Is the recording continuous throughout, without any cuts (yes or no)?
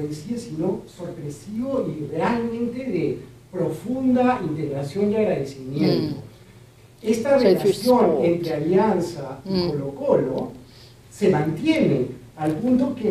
no